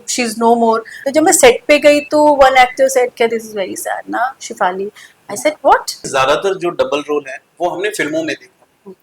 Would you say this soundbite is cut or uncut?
cut